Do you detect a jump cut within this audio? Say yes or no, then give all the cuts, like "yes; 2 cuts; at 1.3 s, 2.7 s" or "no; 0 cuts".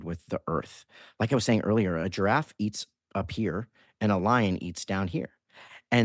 no; 0 cuts